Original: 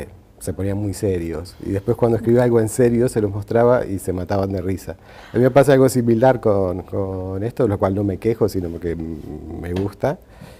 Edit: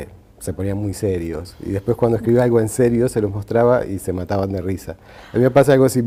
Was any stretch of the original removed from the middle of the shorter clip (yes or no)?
no